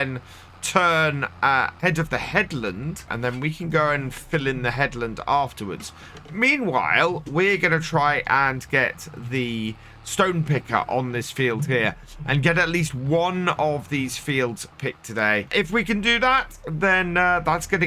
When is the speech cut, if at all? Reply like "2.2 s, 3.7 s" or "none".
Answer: 1.8 s, 3.1 s, 15.5 s